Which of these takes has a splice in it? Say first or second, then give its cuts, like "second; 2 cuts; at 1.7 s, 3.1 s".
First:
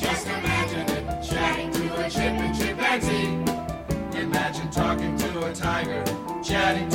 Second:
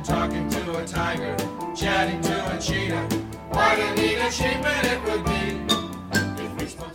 first; 1 cut; at 3.8 s